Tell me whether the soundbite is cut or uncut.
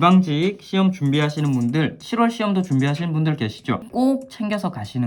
cut